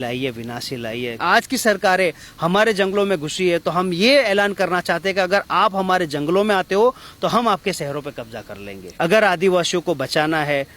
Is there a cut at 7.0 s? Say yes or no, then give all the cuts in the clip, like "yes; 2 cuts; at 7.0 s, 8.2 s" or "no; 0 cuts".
no; 2 cuts; at 1.2 s, 8.8 s